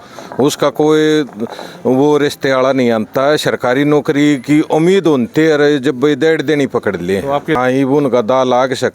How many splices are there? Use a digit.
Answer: 1